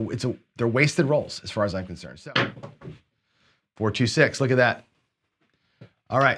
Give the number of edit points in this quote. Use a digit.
1